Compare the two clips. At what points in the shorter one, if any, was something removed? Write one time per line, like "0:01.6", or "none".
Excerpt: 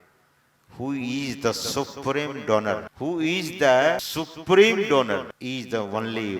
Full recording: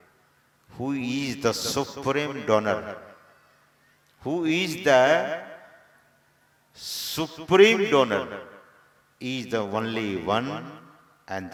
0:02.9
0:04.1
0:05.3